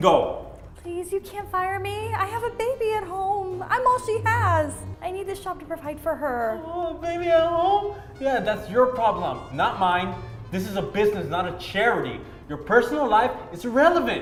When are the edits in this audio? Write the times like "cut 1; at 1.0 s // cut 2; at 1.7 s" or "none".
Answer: none